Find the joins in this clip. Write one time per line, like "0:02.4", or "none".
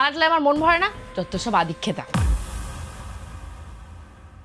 none